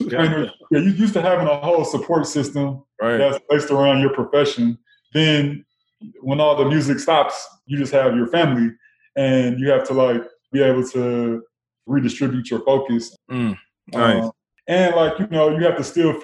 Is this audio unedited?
no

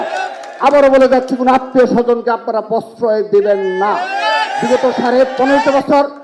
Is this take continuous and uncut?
yes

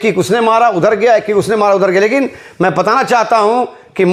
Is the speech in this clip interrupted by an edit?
no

